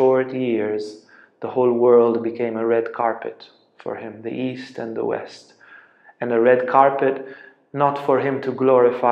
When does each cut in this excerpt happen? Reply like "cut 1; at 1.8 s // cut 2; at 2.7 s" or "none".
none